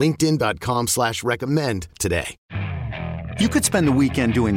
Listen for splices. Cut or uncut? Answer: cut